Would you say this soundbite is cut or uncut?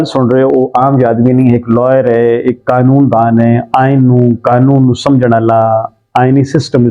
uncut